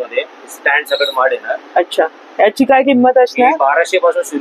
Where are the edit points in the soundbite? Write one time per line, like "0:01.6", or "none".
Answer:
none

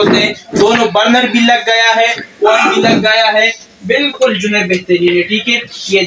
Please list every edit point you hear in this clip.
none

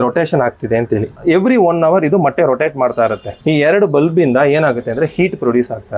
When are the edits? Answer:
0:01.2
0:03.3

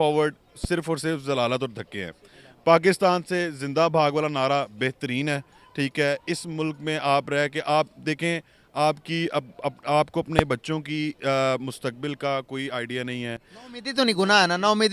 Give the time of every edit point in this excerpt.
none

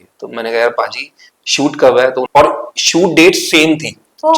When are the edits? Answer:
0:02.3

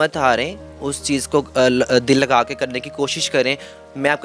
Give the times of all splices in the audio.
none

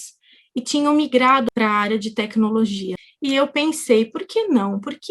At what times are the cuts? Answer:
0:01.4
0:02.9

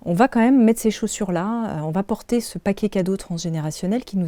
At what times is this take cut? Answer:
none

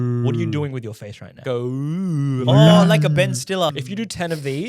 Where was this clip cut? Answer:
0:01.4
0:03.7

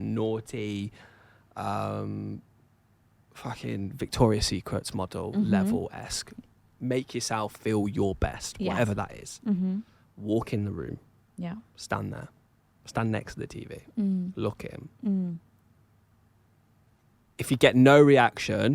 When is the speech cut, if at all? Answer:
0:16.9

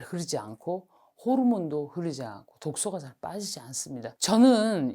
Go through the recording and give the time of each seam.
0:04.0

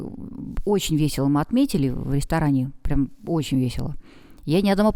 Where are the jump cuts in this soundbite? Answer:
none

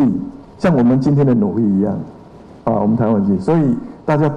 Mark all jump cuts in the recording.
none

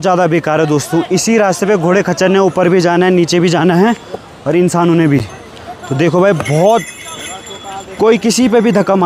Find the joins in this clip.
none

